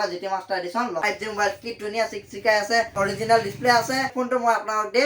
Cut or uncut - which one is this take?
cut